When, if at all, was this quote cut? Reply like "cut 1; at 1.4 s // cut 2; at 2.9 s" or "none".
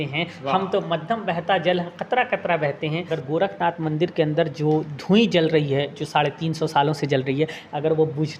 cut 1; at 3.2 s

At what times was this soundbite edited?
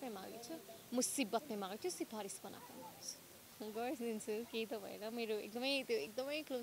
cut 1; at 3.4 s

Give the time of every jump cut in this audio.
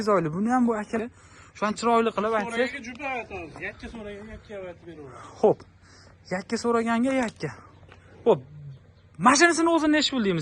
cut 1; at 1.0 s

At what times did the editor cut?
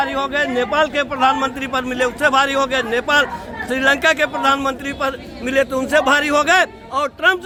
none

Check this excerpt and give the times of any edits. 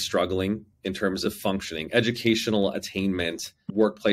cut 1; at 1.2 s

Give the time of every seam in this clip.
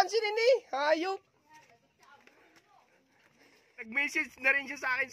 cut 1; at 3.8 s

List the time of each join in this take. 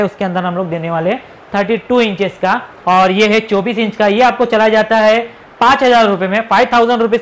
cut 1; at 2.7 s

